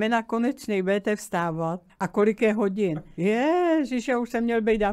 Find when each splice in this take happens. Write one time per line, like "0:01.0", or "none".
0:01.9
0:03.1